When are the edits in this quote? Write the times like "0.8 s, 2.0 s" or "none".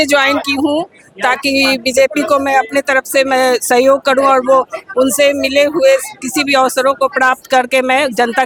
none